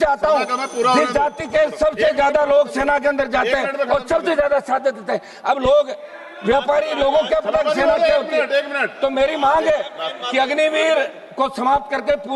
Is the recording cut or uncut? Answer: uncut